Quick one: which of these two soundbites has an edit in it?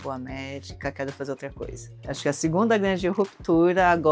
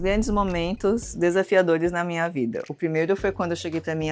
first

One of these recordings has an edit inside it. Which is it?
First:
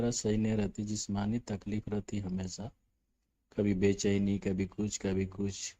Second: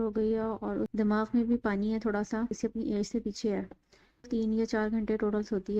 second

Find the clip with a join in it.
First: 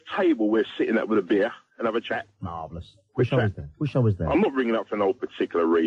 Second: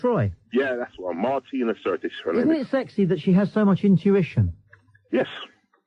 second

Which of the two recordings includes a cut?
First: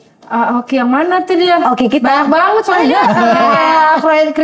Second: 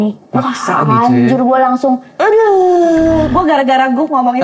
second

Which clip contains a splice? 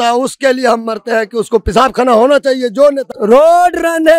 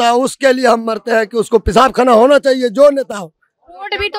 first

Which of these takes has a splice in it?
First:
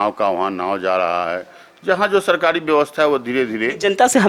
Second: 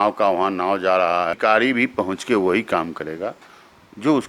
second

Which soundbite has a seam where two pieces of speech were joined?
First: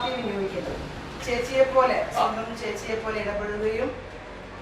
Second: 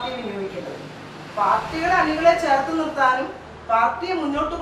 first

